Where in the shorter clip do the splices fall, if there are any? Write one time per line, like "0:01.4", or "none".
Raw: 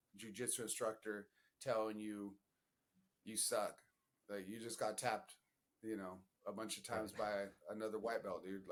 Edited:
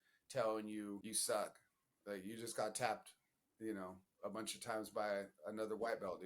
0:01.0